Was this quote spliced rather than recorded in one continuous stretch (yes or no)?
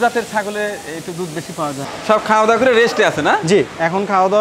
yes